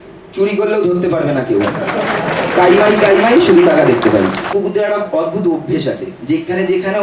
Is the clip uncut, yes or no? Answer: no